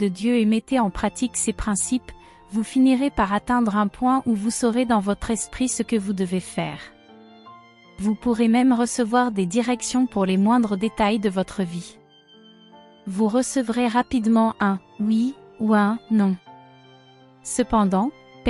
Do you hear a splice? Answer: no; 0 cuts

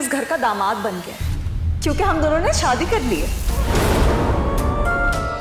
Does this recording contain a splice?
no; 0 cuts

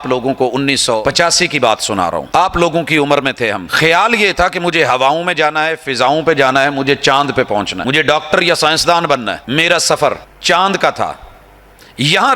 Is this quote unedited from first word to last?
no; 6 cuts; at 1.0 s, 2.3 s, 3.7 s, 7.8 s, 9.4 s, 10.3 s

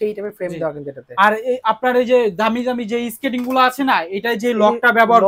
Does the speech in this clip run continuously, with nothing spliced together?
yes; 0 cuts

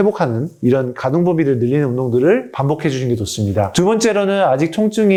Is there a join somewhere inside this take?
no; 0 cuts

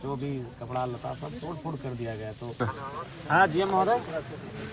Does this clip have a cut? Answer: yes; 1 cut; at 2.5 s

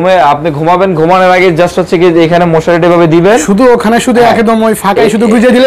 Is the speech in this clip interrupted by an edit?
no; 0 cuts

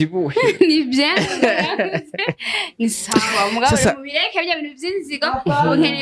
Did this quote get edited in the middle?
no; 0 cuts

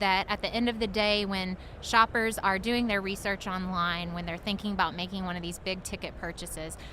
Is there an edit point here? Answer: no; 0 cuts

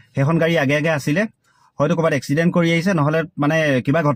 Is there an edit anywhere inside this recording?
no; 0 cuts

